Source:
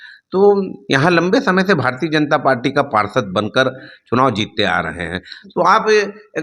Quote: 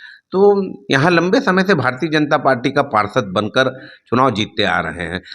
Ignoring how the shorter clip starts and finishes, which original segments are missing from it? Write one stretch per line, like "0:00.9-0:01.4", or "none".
none